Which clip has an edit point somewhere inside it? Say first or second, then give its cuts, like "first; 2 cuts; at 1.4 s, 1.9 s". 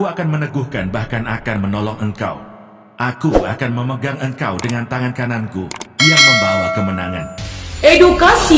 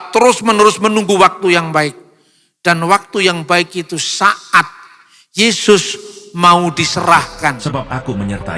second; 1 cut; at 7.6 s